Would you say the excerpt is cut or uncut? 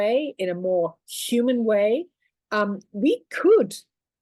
uncut